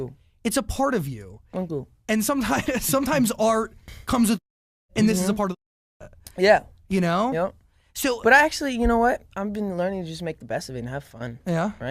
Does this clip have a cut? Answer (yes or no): no